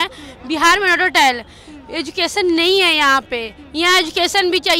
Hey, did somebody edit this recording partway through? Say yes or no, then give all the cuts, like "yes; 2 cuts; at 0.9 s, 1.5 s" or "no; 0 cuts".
no; 0 cuts